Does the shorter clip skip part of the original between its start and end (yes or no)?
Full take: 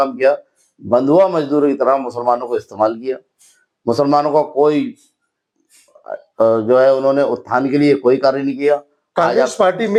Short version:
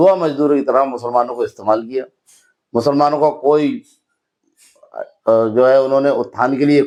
no